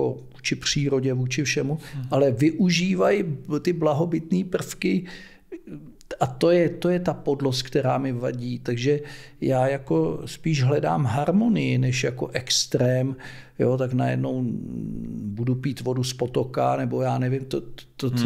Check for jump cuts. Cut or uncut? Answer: uncut